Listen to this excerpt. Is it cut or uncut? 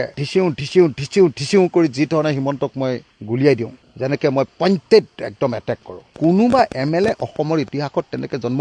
cut